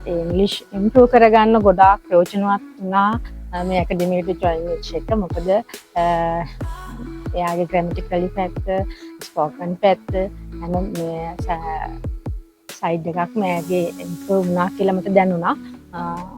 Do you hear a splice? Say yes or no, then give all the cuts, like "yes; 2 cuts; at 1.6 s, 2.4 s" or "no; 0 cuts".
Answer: no; 0 cuts